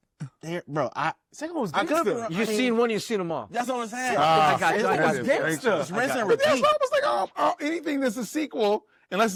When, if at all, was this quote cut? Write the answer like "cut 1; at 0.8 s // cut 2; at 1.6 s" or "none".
none